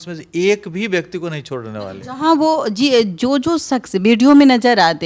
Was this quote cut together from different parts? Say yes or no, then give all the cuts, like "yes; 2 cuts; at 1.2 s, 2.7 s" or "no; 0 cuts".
no; 0 cuts